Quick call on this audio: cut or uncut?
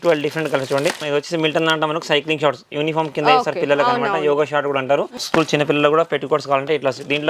cut